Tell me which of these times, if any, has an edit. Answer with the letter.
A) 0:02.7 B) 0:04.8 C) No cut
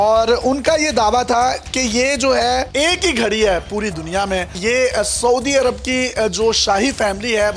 A